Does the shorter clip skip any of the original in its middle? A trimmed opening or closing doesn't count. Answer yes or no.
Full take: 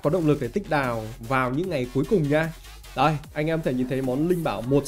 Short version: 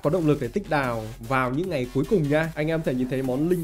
yes